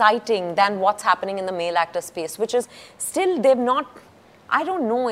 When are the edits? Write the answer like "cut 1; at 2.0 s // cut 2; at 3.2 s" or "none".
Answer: none